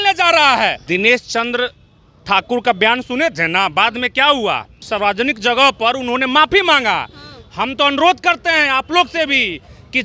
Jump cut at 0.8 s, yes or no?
yes